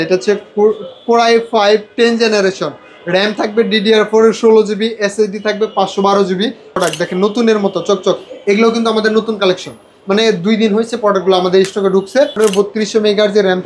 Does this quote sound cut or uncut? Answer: cut